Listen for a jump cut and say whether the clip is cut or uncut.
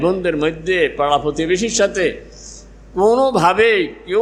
uncut